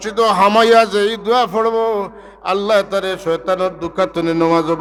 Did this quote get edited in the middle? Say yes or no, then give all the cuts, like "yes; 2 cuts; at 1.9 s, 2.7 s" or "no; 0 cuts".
no; 0 cuts